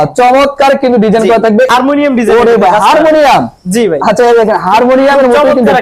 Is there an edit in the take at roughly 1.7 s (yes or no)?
yes